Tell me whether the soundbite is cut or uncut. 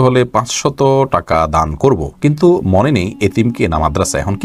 uncut